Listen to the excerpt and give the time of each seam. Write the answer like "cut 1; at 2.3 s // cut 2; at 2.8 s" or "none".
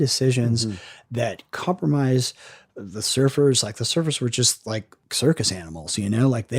cut 1; at 5.0 s